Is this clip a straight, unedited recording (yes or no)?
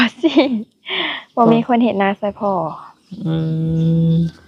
yes